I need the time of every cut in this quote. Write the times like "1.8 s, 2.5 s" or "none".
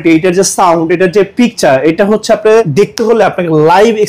2.7 s

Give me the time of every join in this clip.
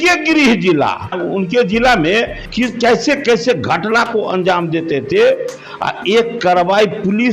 1.2 s, 2.4 s

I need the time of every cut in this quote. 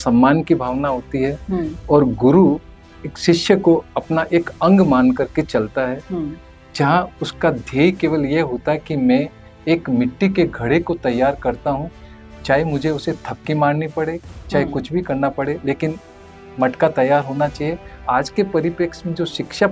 18.0 s

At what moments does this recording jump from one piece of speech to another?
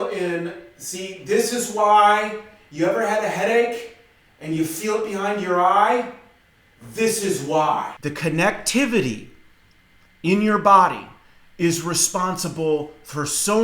8.0 s

